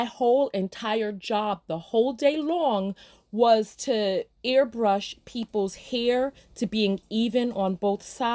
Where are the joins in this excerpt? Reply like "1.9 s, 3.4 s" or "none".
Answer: none